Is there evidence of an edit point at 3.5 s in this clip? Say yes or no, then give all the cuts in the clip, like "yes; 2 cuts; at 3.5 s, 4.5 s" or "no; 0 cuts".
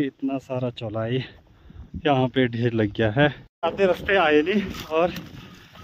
yes; 1 cut; at 3.5 s